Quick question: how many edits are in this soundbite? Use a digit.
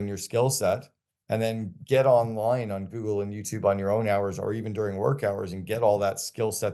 0